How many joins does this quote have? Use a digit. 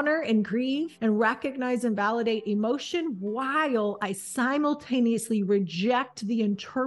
1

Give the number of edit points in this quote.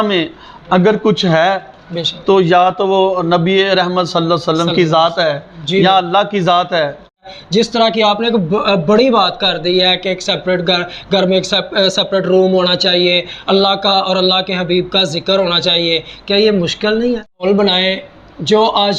2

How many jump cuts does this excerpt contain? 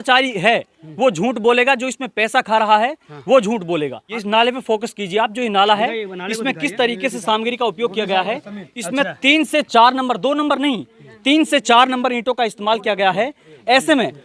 1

